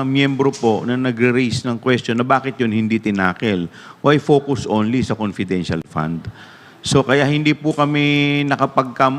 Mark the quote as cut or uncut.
uncut